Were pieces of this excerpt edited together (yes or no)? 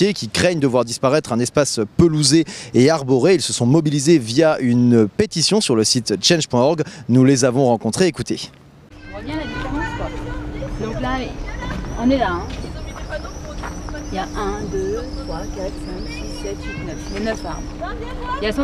yes